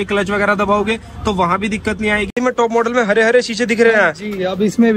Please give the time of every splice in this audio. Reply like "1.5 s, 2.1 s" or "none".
2.4 s